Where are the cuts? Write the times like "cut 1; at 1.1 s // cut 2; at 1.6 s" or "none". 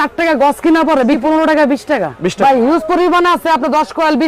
cut 1; at 1.2 s // cut 2; at 2.3 s

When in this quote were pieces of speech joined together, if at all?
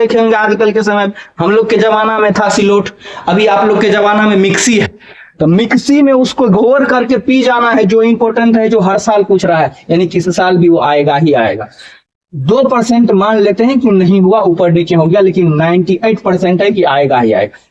none

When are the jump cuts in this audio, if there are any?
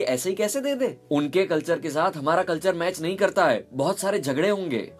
cut 1; at 1.0 s

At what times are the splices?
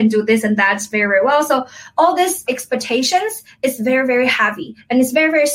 cut 1; at 2.4 s

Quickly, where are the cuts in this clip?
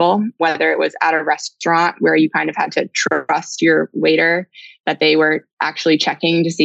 none

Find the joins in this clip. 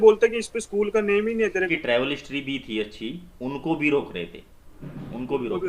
cut 1; at 1.7 s

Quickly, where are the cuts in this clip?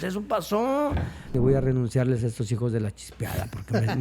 cut 1; at 1.3 s

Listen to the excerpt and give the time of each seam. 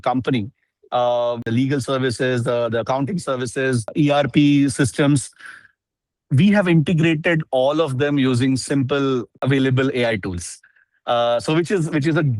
cut 1; at 1.5 s // cut 2; at 3.9 s // cut 3; at 9.3 s

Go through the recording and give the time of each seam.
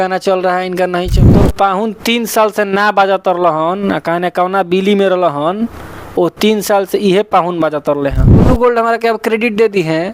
cut 1; at 1.2 s // cut 2; at 8.5 s

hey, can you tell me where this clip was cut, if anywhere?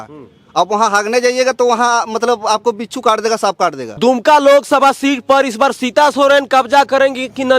cut 1; at 4.0 s

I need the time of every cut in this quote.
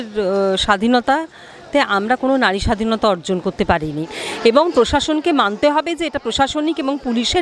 cut 1; at 4.1 s

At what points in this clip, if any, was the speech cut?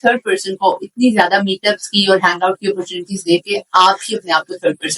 none

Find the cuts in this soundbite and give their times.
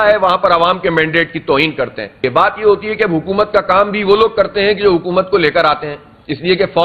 cut 1; at 2.2 s

